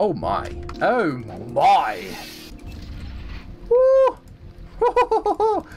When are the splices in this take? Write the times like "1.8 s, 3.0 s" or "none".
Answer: 2.5 s